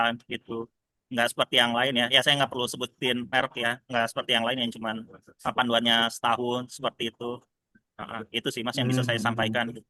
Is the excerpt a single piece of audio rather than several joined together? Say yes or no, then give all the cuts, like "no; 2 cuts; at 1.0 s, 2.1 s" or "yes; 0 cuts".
yes; 0 cuts